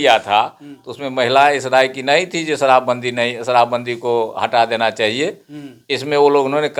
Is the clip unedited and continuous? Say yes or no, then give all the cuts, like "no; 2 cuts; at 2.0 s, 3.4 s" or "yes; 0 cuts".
yes; 0 cuts